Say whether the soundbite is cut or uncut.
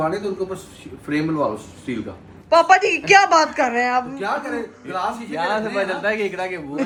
uncut